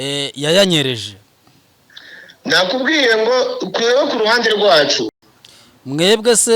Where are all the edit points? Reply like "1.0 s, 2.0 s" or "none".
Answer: 5.2 s

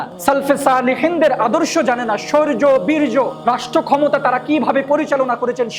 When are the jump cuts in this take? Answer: none

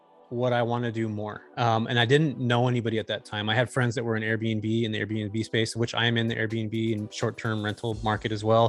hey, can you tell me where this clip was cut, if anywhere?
none

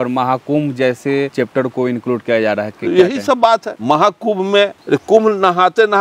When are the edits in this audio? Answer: 1.3 s, 3.7 s, 4.8 s

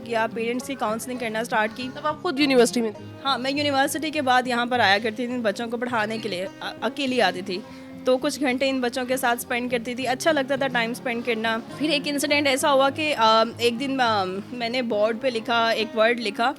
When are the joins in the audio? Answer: none

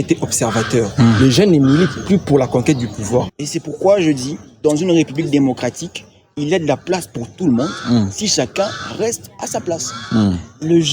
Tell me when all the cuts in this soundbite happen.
3.3 s

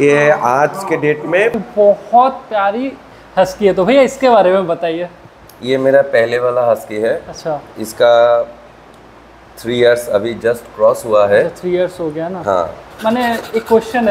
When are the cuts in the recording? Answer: 1.6 s, 12.9 s

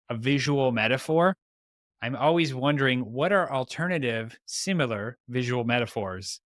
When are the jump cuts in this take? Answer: none

